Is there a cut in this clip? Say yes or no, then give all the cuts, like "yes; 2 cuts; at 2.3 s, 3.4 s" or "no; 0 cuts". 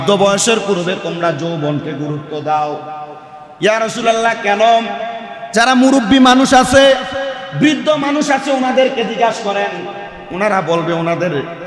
no; 0 cuts